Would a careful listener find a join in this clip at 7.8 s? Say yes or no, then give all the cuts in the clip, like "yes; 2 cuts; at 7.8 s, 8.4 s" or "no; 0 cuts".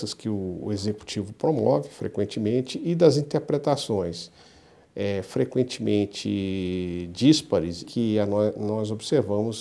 yes; 1 cut; at 7.8 s